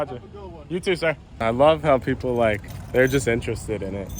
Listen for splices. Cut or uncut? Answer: cut